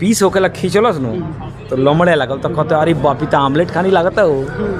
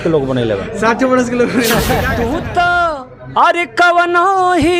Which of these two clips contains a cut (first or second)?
second